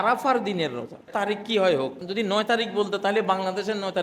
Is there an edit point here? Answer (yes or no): yes